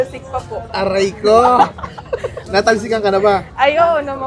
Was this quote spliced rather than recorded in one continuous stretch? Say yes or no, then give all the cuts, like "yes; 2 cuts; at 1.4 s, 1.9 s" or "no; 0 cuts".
yes; 1 cut; at 2.3 s